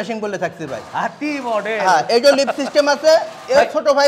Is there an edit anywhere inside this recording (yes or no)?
no